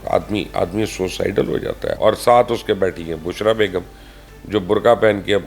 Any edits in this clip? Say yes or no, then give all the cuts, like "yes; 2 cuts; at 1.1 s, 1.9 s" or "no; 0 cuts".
yes; 1 cut; at 2.0 s